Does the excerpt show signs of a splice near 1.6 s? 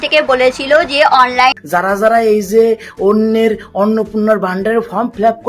yes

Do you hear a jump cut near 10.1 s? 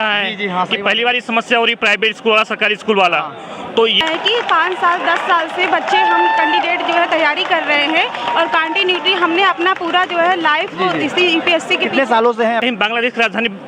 no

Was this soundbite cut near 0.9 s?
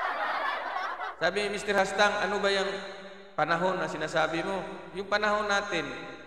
yes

